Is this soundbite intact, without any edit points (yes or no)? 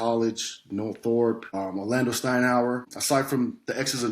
no